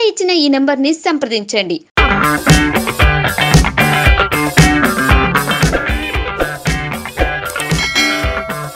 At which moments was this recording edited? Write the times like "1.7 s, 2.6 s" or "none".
none